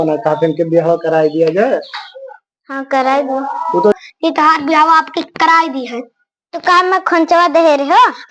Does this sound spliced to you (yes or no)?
yes